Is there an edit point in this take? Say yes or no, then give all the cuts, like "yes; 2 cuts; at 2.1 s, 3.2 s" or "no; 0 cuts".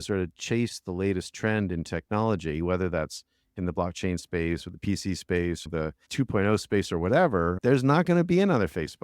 yes; 2 cuts; at 5.7 s, 7.6 s